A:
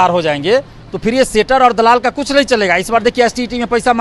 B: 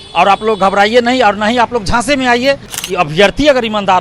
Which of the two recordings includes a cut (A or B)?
B